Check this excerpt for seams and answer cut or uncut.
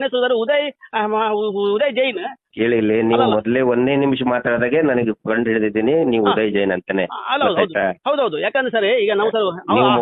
cut